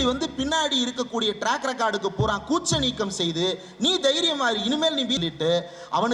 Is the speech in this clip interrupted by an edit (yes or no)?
yes